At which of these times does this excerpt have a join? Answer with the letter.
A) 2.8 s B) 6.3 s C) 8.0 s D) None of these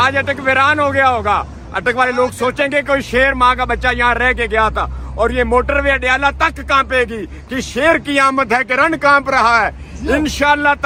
D